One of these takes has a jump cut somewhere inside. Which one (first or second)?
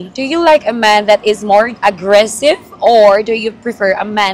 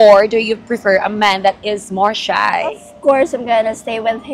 second